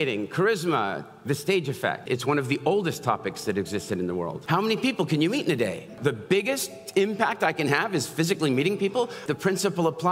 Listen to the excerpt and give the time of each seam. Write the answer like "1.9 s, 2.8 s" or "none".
2.0 s, 4.4 s, 6.0 s, 9.2 s